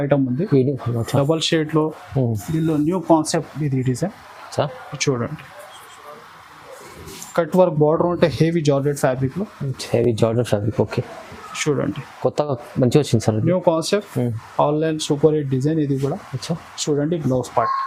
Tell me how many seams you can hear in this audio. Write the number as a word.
zero